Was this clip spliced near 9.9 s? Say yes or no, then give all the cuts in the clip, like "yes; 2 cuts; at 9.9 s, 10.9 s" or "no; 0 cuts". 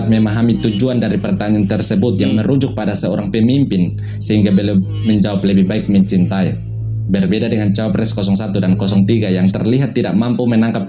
no; 0 cuts